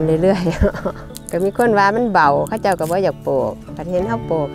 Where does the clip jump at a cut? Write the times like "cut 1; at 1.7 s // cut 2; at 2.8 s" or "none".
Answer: cut 1; at 1.0 s